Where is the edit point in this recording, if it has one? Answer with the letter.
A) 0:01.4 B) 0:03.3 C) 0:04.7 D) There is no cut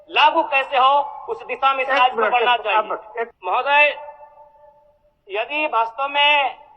B